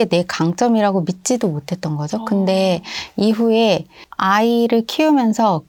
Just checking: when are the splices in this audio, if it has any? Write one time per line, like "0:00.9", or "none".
none